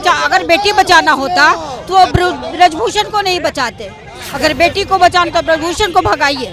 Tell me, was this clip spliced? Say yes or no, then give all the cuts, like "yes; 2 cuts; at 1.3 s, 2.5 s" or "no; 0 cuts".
no; 0 cuts